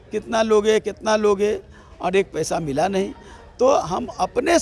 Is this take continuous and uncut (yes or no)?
yes